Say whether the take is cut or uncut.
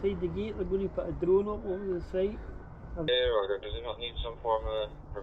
cut